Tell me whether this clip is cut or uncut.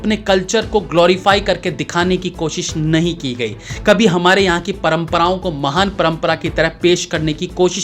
uncut